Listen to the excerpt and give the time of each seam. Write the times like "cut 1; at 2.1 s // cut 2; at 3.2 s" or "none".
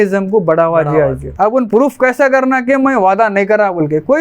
cut 1; at 1.3 s